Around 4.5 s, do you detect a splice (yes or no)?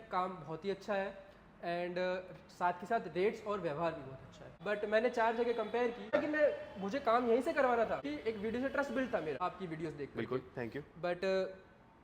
yes